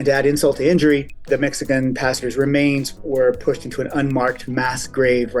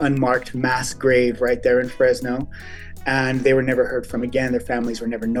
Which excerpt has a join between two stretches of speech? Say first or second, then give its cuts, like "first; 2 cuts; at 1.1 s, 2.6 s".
first; 2 cuts; at 1.3 s, 3.0 s